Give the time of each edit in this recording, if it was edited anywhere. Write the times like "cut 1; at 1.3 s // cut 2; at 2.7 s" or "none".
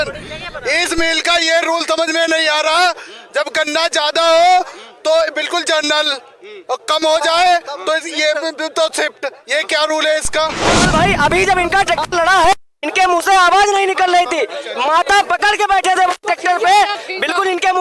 cut 1; at 10.6 s